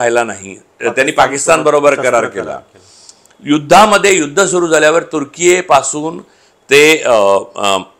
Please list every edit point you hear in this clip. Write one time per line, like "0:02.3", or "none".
none